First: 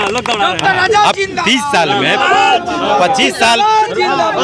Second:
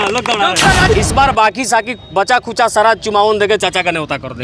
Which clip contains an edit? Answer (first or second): second